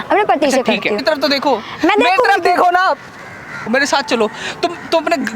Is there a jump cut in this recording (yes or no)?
yes